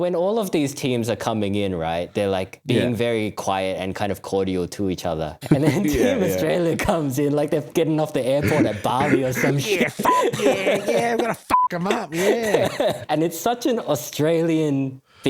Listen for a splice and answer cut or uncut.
cut